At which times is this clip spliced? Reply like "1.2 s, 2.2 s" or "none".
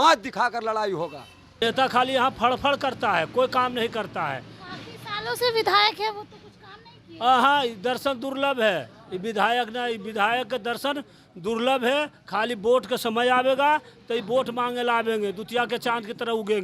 1.6 s